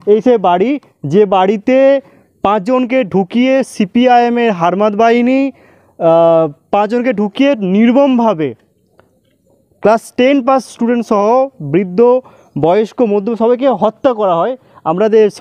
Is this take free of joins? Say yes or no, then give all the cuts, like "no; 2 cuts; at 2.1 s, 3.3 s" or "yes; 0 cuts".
yes; 0 cuts